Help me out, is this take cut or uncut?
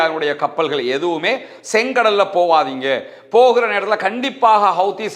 uncut